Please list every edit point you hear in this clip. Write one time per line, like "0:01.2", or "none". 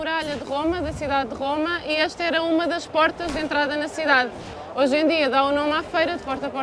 none